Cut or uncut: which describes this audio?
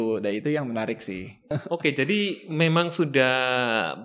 cut